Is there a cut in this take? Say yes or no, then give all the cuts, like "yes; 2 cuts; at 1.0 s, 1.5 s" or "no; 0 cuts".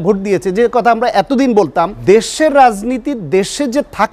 yes; 1 cut; at 2.0 s